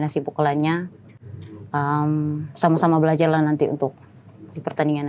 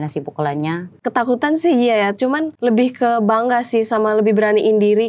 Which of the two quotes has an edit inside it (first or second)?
second